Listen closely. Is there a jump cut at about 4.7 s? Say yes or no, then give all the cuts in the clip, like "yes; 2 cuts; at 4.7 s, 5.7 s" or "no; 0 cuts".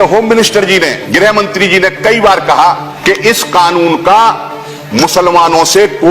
no; 2 cuts; at 1.0 s, 2.9 s